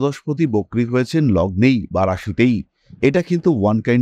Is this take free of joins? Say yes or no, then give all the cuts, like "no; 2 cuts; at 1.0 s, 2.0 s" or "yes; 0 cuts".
yes; 0 cuts